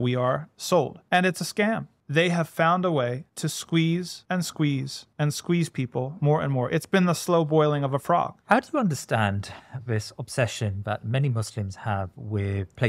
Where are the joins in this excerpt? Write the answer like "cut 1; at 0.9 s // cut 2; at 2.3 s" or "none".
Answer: cut 1; at 1.0 s // cut 2; at 1.9 s // cut 3; at 3.3 s // cut 4; at 4.1 s // cut 5; at 5.0 s // cut 6; at 8.4 s

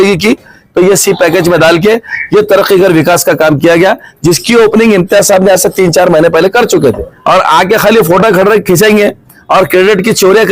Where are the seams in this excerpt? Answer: cut 1; at 7.1 s

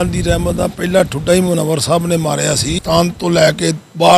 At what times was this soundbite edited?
cut 1; at 2.8 s

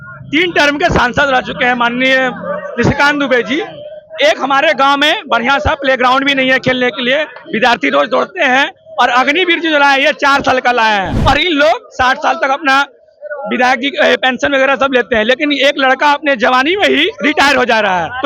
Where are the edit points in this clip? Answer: cut 1; at 11.1 s

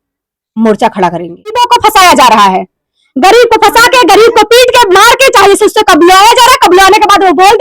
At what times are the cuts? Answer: cut 1; at 1.6 s

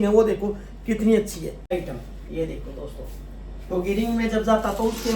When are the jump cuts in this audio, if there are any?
cut 1; at 1.8 s

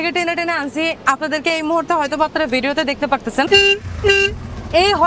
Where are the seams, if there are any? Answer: cut 1; at 3.5 s

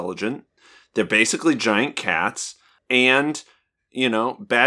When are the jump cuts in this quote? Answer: cut 1; at 2.8 s

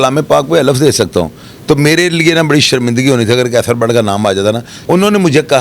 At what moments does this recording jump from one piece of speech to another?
cut 1; at 4.7 s

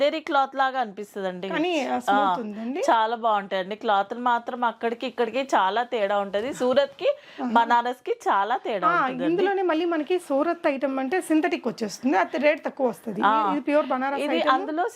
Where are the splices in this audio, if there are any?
none

